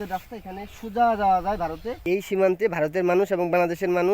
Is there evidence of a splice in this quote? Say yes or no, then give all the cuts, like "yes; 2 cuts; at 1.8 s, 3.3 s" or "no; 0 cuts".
yes; 1 cut; at 2.0 s